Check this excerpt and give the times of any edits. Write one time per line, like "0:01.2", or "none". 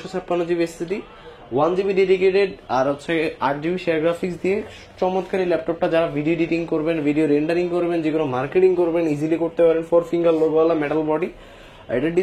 none